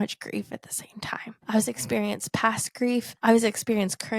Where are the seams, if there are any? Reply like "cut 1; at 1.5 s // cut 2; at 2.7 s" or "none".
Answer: cut 1; at 1.4 s // cut 2; at 3.1 s